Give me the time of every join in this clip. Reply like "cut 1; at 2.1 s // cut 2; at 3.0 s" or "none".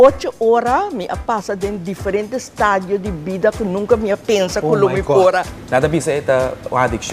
cut 1; at 5.6 s